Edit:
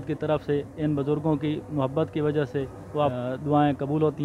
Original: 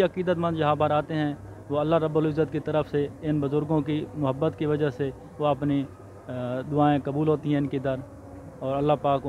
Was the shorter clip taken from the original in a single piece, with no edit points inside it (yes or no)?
no